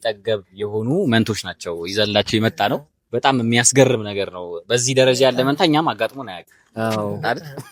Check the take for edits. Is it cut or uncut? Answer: uncut